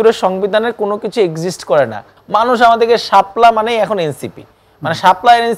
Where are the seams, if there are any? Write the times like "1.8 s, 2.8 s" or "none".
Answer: 2.1 s